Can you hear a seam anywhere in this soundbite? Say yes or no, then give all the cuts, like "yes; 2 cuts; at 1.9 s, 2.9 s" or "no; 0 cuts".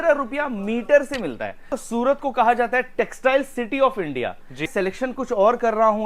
yes; 2 cuts; at 1.8 s, 4.7 s